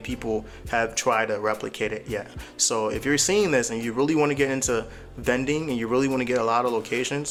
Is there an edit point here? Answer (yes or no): no